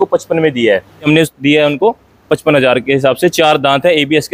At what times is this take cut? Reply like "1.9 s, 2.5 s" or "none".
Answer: 1.1 s